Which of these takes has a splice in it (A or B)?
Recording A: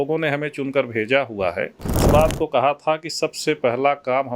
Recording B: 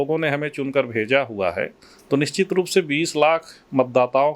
A